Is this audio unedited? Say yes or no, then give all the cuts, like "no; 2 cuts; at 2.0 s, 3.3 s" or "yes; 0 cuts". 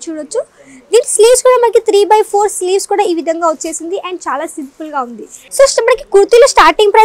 no; 1 cut; at 5.4 s